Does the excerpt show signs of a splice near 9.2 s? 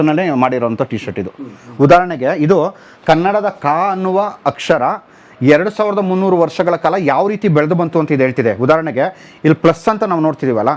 no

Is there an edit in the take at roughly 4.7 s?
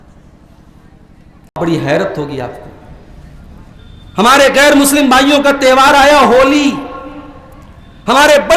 no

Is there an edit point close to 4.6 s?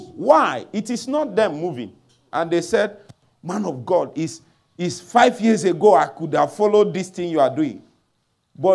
no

